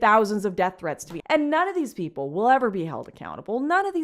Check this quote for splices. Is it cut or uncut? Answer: cut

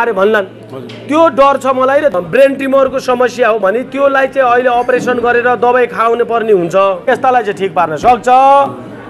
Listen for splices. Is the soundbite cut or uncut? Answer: cut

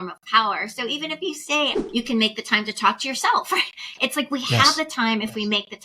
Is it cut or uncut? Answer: cut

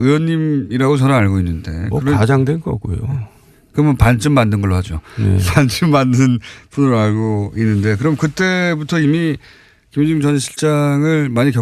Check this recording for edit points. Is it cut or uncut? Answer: cut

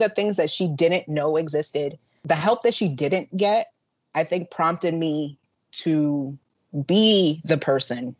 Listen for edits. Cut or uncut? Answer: cut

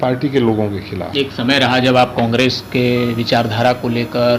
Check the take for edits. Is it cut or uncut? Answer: uncut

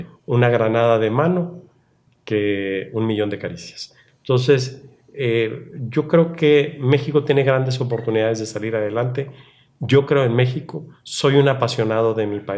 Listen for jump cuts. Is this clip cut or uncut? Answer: uncut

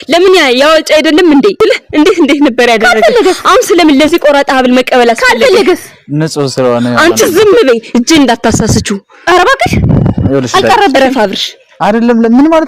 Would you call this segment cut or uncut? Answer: cut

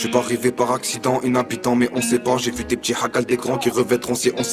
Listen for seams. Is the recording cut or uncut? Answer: uncut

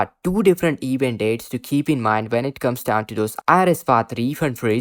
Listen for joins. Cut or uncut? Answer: uncut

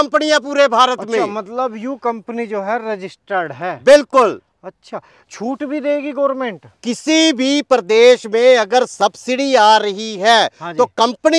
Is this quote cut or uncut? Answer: uncut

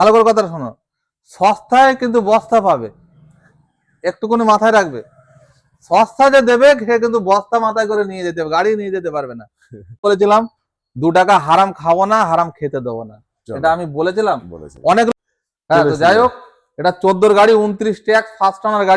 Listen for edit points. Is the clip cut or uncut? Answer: cut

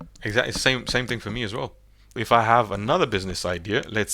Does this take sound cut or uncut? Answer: cut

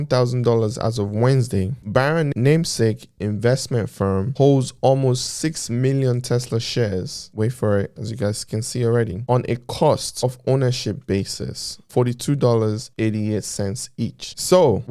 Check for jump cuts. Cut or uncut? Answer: uncut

